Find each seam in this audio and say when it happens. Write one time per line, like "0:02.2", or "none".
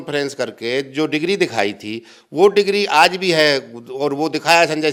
none